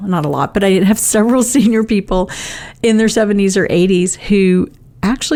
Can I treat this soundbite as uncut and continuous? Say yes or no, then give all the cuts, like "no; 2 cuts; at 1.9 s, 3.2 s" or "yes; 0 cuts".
yes; 0 cuts